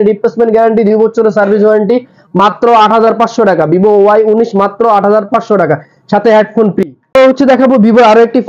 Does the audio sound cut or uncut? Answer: uncut